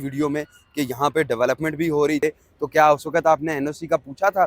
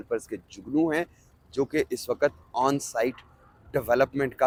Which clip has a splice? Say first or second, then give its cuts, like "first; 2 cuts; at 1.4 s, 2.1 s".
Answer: first; 1 cut; at 2.2 s